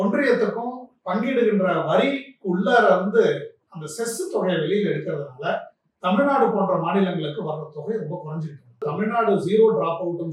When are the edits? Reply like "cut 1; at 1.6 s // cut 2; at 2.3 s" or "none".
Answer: cut 1; at 8.9 s